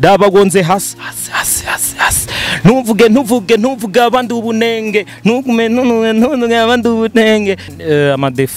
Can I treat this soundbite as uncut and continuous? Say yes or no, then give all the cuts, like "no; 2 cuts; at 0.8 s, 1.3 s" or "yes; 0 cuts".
no; 1 cut; at 7.7 s